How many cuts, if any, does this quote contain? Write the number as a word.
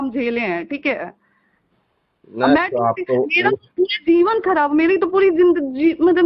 zero